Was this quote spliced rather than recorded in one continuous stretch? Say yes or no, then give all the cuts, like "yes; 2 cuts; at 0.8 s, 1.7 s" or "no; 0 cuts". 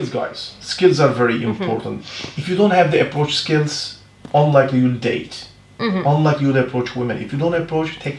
no; 0 cuts